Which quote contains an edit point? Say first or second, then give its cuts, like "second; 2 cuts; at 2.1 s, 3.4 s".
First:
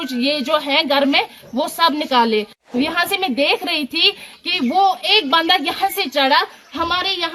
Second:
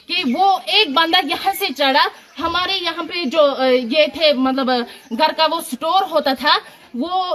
first; 1 cut; at 2.6 s